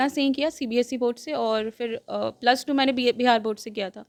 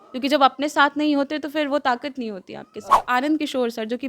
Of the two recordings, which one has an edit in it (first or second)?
second